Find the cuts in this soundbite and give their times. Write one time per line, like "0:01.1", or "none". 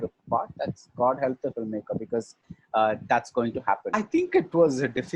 0:03.9